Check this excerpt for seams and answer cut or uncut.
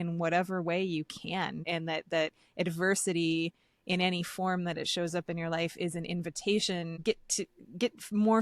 cut